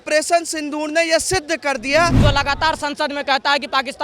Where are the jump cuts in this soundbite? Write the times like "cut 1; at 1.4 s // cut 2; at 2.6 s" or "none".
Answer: cut 1; at 2.2 s